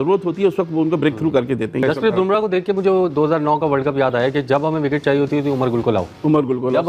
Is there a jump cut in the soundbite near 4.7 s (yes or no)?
no